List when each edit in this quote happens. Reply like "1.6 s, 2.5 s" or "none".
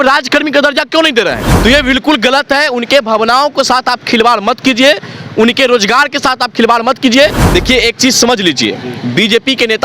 1.5 s, 7.4 s

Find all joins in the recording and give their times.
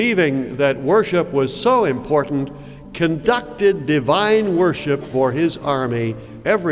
none

